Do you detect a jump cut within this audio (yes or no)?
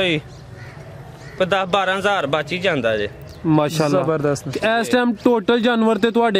no